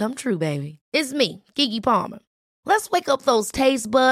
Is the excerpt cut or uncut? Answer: uncut